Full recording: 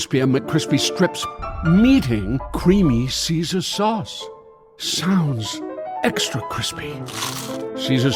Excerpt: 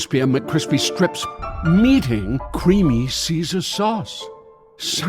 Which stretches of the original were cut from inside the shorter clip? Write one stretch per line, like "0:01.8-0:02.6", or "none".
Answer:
none